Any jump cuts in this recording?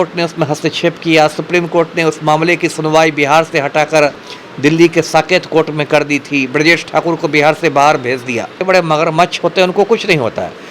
yes; 1 cut; at 8.6 s

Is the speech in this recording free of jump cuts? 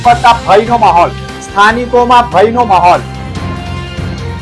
yes; 0 cuts

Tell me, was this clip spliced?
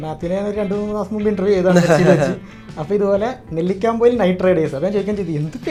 no; 0 cuts

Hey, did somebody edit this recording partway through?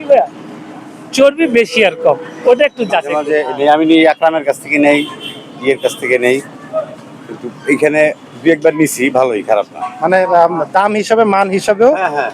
yes; 2 cuts; at 3.1 s, 9.8 s

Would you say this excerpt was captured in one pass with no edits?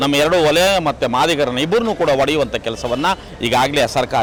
yes; 0 cuts

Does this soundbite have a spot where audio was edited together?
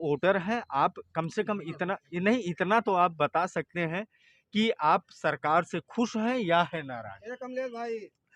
no; 0 cuts

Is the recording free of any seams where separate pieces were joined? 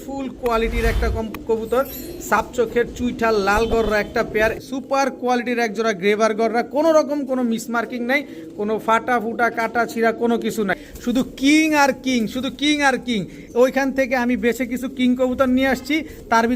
no; 2 cuts; at 4.6 s, 10.9 s

